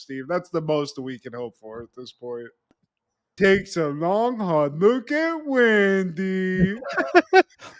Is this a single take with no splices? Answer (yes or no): no